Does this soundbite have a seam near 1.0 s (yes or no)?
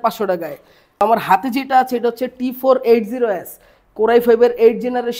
yes